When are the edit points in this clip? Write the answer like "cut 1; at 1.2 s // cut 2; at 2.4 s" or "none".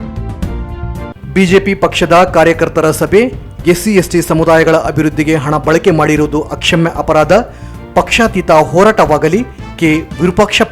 cut 1; at 1.1 s